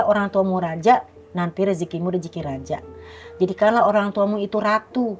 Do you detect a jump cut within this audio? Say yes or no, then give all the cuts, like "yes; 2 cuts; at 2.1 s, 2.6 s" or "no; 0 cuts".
no; 0 cuts